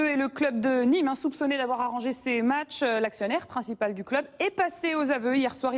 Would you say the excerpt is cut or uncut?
cut